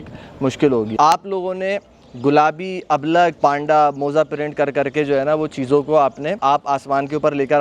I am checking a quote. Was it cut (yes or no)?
yes